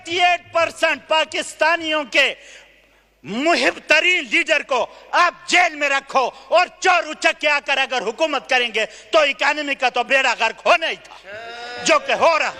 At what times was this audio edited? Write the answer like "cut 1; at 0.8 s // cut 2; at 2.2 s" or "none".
none